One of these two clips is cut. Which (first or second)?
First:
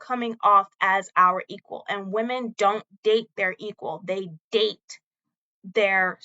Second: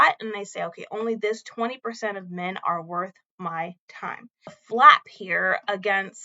second